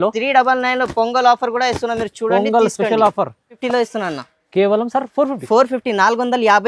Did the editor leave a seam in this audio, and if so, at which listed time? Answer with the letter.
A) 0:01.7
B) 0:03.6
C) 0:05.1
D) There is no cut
B